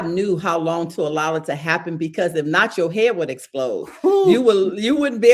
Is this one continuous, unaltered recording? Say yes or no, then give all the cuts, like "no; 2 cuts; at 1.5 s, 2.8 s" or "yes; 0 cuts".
yes; 0 cuts